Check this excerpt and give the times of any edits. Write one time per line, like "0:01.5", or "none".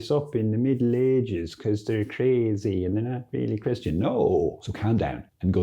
0:04.5